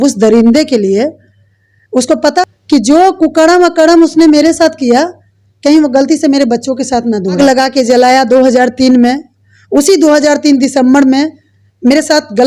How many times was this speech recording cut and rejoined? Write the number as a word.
two